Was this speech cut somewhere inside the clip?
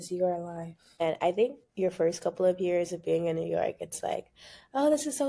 yes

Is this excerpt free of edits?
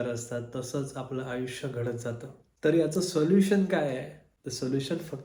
yes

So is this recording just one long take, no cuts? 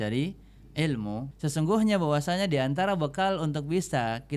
no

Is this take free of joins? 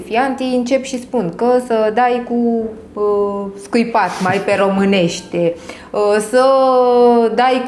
yes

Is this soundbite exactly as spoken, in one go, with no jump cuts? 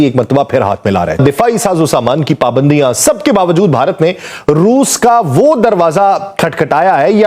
no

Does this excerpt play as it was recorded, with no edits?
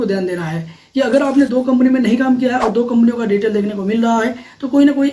yes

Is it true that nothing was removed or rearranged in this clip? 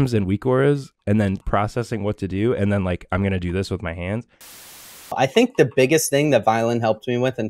no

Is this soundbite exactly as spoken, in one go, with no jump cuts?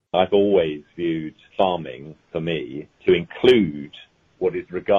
no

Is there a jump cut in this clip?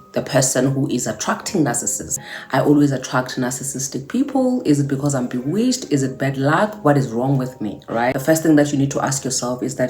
yes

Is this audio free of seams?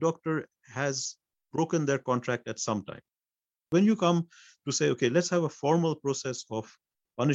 no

